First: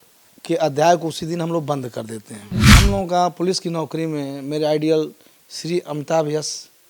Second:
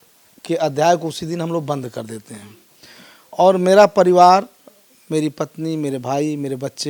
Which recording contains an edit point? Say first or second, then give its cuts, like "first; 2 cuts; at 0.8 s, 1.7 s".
first; 1 cut; at 2.7 s